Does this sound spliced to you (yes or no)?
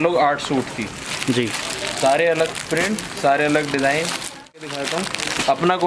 yes